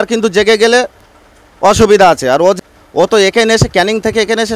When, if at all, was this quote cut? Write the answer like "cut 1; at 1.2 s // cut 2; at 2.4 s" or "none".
cut 1; at 2.6 s